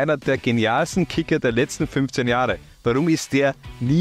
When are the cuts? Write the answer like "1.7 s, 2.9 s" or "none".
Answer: none